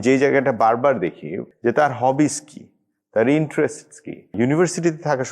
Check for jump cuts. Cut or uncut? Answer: cut